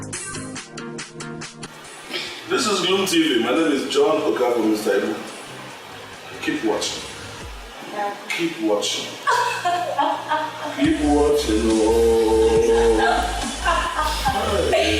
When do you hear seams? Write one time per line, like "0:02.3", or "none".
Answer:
0:01.9